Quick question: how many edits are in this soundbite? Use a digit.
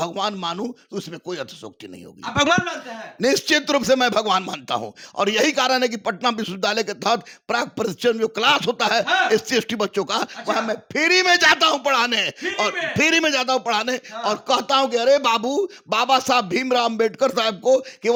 0